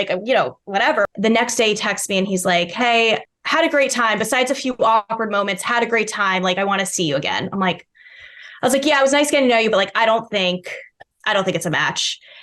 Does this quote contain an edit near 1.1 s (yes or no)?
yes